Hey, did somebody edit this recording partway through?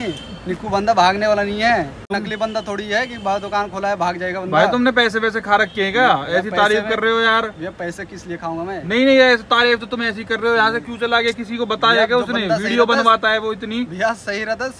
yes; 1 cut; at 2.0 s

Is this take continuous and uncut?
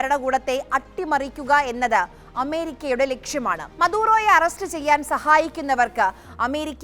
no; 1 cut; at 3.7 s

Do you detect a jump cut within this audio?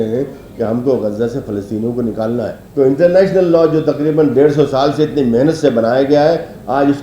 yes; 1 cut; at 2.6 s

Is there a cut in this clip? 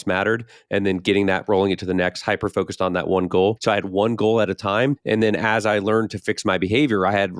yes; 2 cuts; at 3.6 s, 5.0 s

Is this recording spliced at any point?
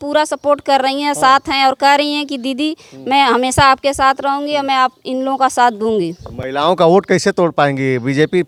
no; 0 cuts

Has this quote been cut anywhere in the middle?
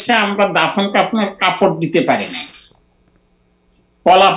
no; 0 cuts

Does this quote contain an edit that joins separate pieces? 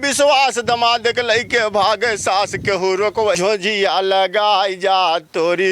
yes; 1 cut; at 3.4 s

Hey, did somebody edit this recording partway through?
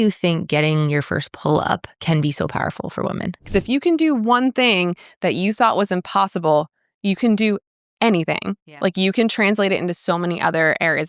yes; 2 cuts; at 1.9 s, 3.5 s

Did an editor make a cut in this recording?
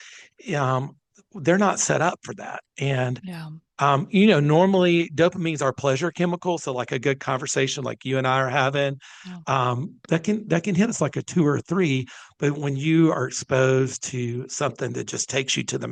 no; 0 cuts

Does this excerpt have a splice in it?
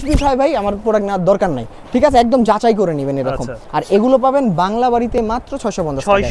no; 0 cuts

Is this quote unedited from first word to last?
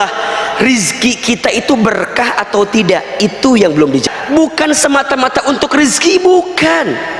no; 1 cut; at 4.0 s

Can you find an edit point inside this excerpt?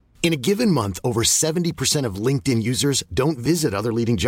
no; 0 cuts

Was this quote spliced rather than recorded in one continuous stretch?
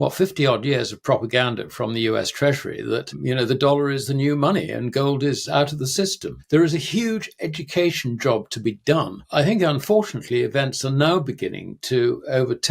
yes; 3 cuts; at 3.1 s, 6.3 s, 9.2 s

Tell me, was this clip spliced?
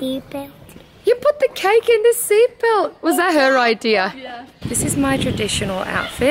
yes; 1 cut; at 4.6 s

